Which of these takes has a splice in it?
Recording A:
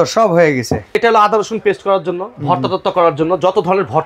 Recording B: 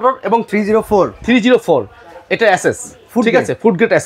A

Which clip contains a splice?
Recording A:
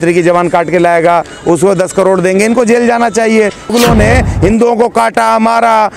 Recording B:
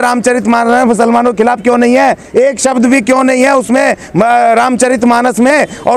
A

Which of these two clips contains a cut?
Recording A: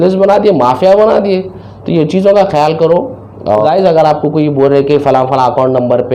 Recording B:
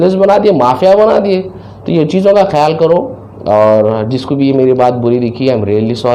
A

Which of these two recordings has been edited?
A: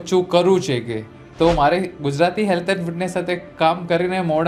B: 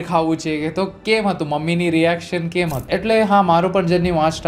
B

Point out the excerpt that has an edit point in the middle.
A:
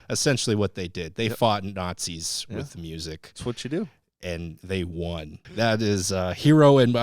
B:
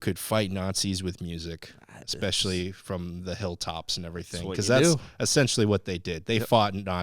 A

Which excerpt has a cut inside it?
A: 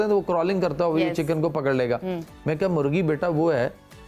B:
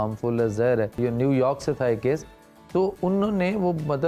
B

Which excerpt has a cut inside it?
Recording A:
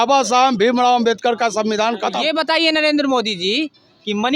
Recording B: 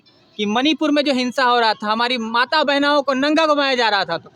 A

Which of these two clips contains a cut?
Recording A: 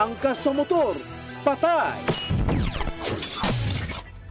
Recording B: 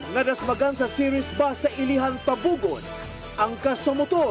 A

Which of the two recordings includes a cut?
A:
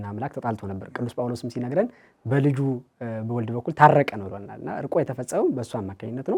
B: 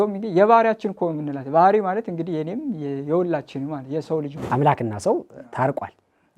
B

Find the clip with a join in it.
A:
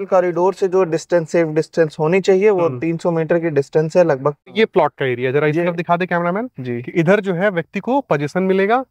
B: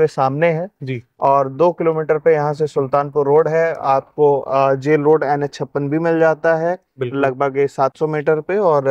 A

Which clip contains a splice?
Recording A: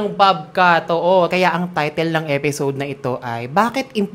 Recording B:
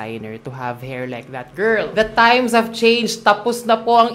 A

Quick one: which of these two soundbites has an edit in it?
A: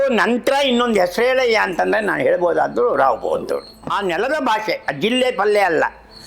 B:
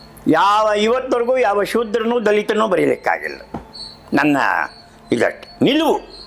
A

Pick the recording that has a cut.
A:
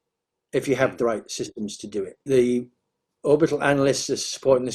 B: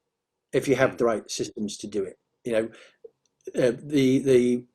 A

